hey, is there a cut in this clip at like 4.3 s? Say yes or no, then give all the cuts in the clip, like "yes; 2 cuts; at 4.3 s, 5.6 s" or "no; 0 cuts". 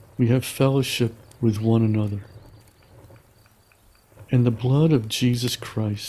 yes; 2 cuts; at 2.2 s, 4.3 s